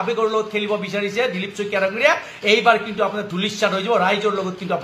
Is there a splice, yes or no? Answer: no